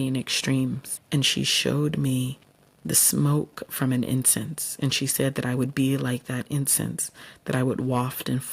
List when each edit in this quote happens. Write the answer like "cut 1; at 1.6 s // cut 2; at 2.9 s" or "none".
cut 1; at 0.9 s